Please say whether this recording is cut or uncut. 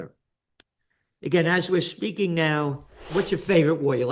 cut